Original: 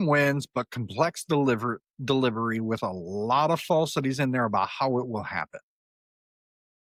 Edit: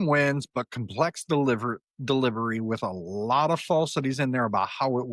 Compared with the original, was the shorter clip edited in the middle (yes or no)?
no